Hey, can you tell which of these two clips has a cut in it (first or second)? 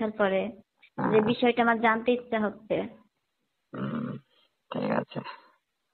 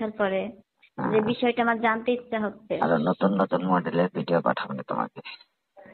second